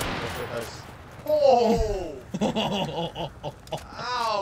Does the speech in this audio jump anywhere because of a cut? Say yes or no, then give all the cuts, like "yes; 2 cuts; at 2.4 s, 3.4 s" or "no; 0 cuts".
no; 0 cuts